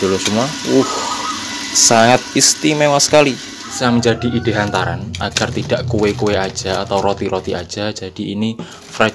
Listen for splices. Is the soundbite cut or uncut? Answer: cut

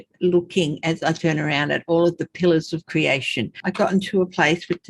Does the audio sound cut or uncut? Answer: cut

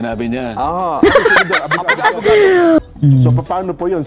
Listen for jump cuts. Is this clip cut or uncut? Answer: cut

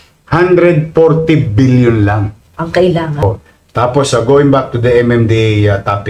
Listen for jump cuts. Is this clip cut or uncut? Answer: cut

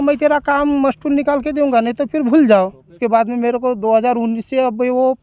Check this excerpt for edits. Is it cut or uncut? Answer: cut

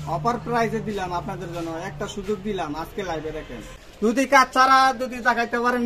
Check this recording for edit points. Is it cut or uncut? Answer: cut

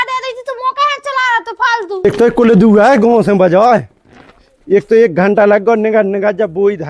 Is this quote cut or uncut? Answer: cut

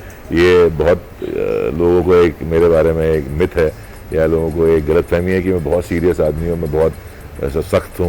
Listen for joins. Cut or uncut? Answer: uncut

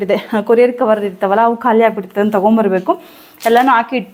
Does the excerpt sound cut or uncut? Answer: uncut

